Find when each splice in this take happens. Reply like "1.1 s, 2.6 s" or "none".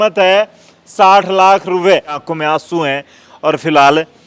2.3 s